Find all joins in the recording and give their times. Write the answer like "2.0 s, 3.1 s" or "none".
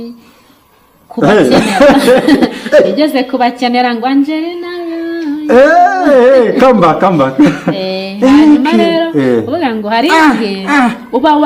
none